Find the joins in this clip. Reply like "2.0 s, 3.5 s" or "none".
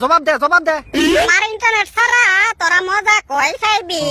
1.3 s